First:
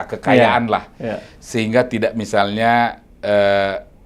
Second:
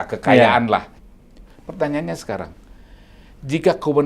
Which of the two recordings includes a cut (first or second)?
second